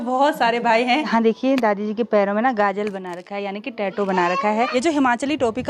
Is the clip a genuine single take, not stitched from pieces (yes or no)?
no